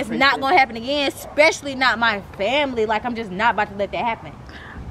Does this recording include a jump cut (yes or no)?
no